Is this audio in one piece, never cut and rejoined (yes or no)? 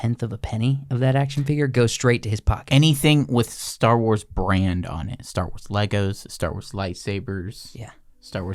yes